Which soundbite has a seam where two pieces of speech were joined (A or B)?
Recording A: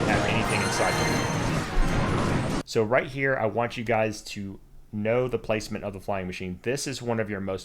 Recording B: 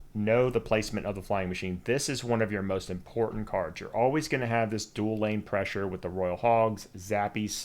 A